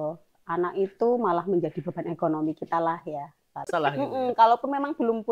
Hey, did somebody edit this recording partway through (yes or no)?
yes